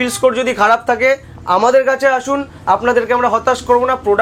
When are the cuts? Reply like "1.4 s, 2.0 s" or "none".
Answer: none